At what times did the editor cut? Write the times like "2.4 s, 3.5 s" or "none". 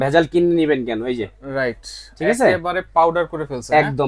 none